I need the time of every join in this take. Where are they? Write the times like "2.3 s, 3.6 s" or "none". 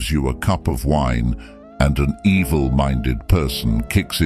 none